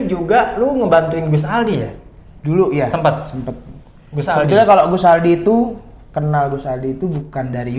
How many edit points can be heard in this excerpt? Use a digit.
0